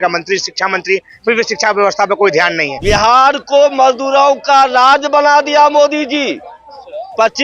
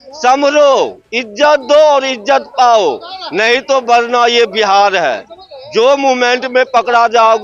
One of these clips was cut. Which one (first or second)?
first